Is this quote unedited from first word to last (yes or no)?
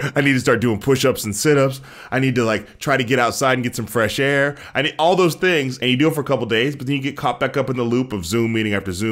no